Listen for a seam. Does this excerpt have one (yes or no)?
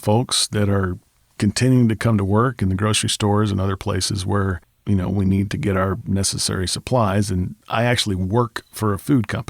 yes